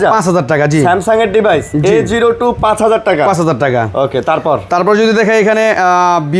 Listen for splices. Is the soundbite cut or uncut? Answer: uncut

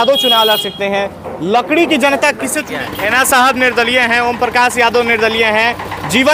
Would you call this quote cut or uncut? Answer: cut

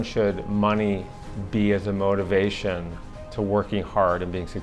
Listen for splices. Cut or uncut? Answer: uncut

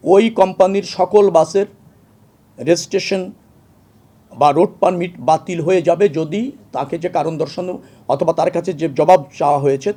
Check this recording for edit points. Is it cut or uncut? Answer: uncut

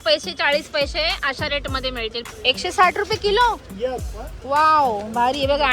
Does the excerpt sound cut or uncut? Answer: cut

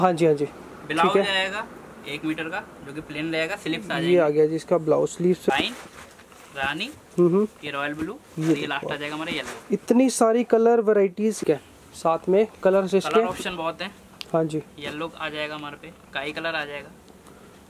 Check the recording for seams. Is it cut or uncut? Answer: cut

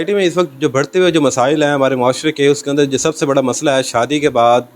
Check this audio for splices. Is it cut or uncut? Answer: uncut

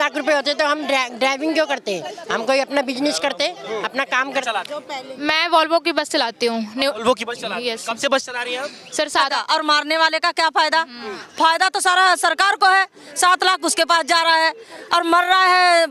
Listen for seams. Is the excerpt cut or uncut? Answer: cut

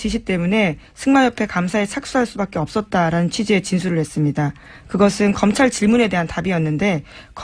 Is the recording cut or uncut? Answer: cut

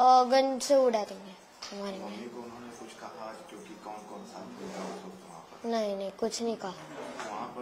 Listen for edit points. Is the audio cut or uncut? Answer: uncut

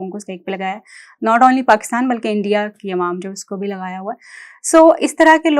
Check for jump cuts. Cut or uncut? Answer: uncut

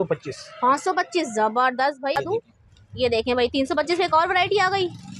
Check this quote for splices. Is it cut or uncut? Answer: cut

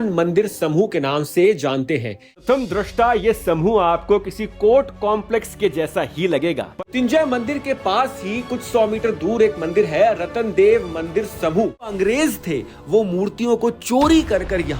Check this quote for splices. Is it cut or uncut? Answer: cut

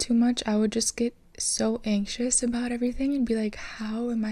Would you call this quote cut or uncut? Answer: uncut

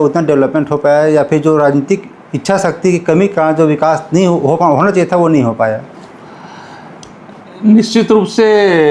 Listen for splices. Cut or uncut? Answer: uncut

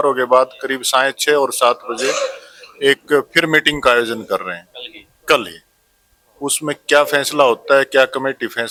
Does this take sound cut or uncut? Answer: uncut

